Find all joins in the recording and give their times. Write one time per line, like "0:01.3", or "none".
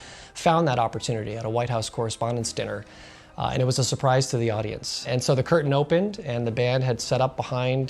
0:05.1